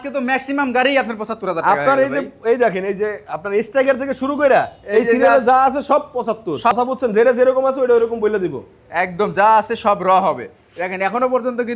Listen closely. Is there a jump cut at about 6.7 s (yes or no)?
yes